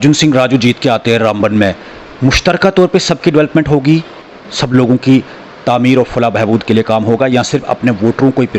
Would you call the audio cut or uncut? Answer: uncut